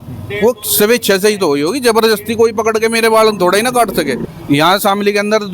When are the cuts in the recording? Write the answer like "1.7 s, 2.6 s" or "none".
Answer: 4.2 s